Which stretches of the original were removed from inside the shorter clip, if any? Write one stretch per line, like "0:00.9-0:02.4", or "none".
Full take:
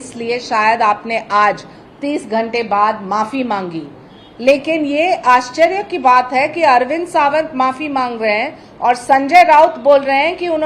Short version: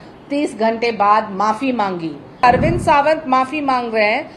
0:04.1-0:06.7